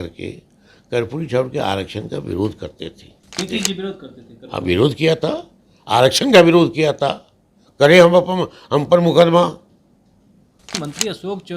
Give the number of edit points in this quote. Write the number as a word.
two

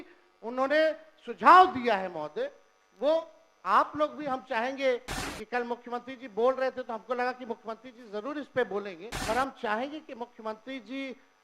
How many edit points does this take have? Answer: one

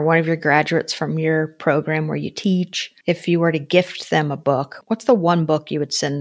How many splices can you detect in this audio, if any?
two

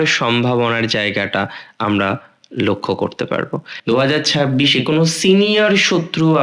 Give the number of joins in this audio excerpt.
one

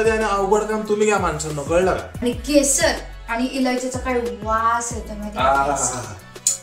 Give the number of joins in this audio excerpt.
one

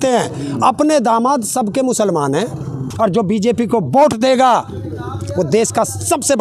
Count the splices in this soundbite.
one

